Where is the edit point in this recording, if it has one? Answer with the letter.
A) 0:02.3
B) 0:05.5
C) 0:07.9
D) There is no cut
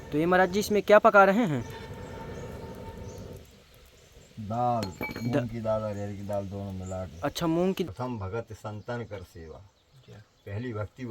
C